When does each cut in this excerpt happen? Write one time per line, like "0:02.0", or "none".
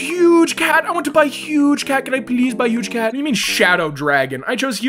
none